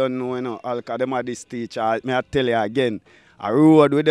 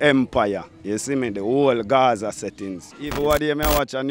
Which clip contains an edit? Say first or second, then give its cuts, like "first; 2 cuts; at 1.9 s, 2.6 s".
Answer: second; 1 cut; at 3.1 s